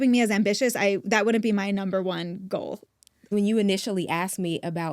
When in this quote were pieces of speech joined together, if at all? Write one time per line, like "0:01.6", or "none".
0:03.1